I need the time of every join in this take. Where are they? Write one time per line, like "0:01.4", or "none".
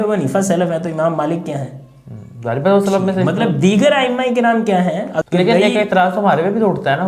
0:05.2